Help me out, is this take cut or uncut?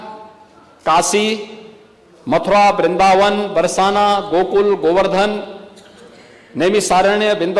uncut